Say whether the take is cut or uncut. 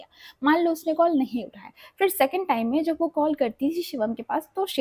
uncut